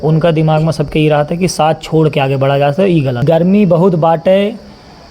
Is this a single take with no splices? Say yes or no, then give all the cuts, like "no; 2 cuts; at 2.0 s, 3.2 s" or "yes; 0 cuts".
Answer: no; 1 cut; at 3.2 s